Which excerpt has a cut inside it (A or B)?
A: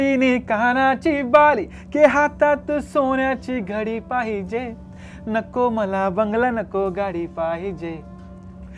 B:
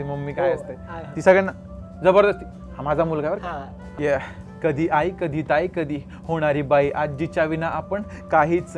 B